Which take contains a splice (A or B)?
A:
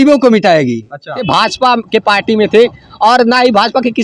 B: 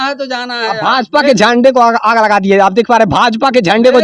A